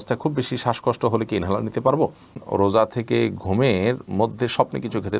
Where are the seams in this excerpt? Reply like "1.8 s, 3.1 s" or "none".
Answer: 2.4 s